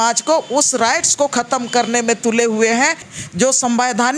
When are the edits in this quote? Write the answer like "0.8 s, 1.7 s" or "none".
3.1 s